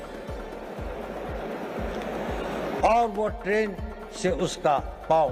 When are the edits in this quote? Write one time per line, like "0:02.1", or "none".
none